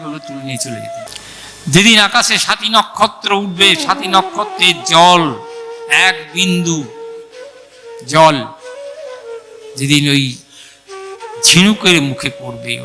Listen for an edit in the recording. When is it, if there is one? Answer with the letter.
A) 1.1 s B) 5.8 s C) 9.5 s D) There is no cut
A